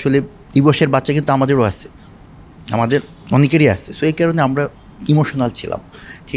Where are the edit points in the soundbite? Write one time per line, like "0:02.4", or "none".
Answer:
none